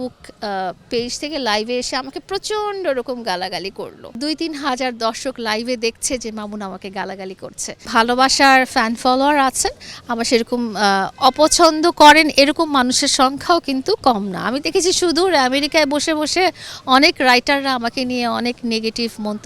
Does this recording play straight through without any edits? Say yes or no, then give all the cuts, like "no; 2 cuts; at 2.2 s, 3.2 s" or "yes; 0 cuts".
no; 2 cuts; at 4.2 s, 7.9 s